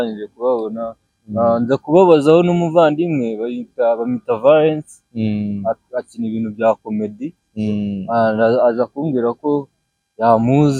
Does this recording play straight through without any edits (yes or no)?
yes